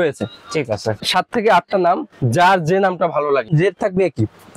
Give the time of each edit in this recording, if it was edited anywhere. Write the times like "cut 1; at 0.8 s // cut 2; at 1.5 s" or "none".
cut 1; at 1.0 s // cut 2; at 3.5 s